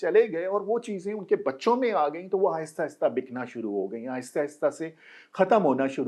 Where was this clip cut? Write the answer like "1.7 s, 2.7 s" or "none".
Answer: none

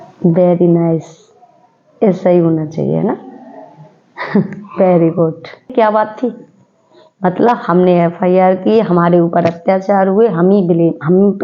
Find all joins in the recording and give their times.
5.7 s

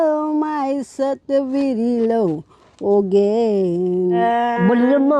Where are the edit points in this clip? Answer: 4.2 s

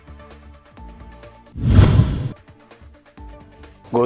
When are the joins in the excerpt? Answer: 1.2 s

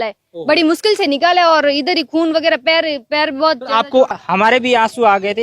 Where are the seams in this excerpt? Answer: 4.1 s

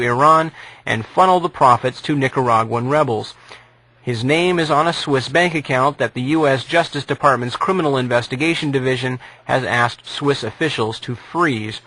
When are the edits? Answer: 2.0 s

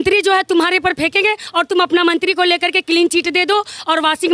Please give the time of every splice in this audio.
none

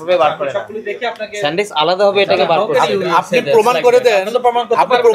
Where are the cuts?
none

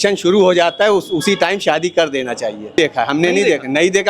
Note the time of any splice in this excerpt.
2.7 s

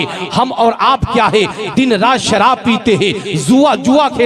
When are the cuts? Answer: none

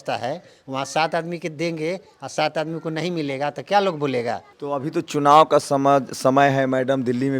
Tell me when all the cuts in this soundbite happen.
4.5 s

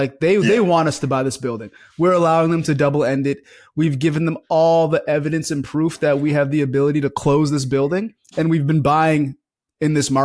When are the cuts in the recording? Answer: none

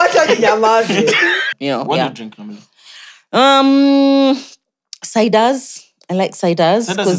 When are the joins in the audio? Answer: 1.5 s

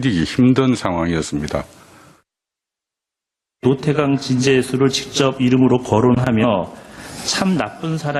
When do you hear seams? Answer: none

